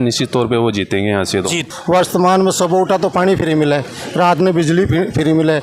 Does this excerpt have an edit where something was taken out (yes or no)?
yes